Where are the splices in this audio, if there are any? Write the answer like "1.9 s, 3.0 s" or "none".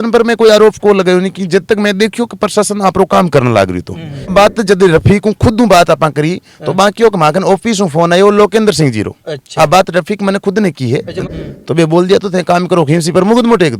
4.3 s, 11.2 s